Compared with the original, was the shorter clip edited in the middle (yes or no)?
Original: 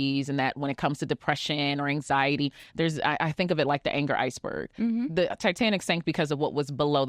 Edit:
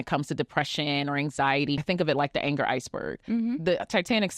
yes